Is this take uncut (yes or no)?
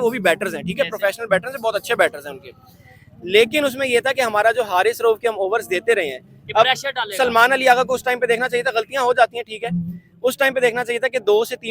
yes